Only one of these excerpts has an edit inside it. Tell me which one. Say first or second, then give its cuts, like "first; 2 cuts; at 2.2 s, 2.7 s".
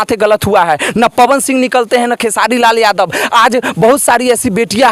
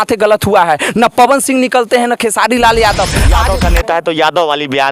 second; 1 cut; at 3.4 s